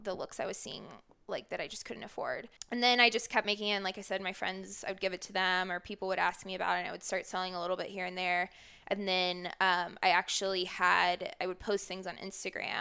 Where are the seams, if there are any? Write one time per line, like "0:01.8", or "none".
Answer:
0:02.5